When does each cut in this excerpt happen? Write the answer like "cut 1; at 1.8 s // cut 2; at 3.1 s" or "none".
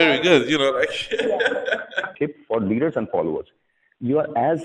cut 1; at 2.1 s